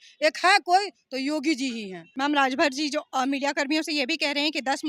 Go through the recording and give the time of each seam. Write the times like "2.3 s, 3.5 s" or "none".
2.0 s